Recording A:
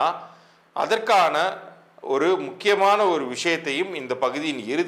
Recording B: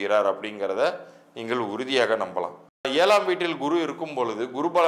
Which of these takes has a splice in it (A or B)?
B